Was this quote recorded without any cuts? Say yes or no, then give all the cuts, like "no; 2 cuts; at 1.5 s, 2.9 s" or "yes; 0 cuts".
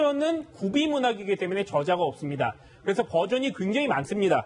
yes; 0 cuts